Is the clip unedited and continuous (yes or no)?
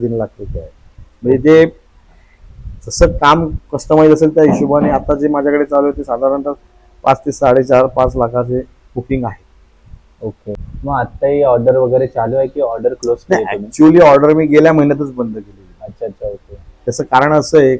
yes